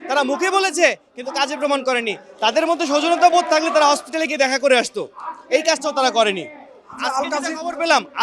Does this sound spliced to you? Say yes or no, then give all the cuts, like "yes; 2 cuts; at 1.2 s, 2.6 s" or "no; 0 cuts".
no; 0 cuts